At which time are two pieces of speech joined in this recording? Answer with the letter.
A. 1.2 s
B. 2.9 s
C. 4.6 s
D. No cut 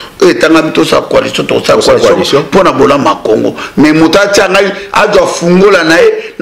D